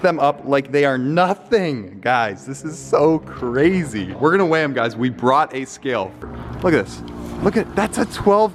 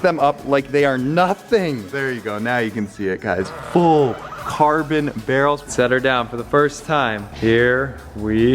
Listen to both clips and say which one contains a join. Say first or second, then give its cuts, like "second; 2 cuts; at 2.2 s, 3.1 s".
second; 3 cuts; at 1.9 s, 5.7 s, 7.3 s